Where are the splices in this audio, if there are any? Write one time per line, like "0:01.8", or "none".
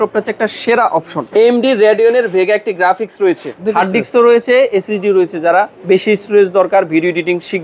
0:01.3
0:03.5